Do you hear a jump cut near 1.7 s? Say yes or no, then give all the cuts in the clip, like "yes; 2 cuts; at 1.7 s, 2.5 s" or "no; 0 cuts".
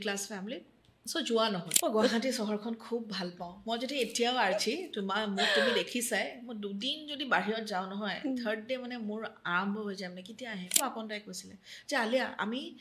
yes; 2 cuts; at 1.7 s, 10.8 s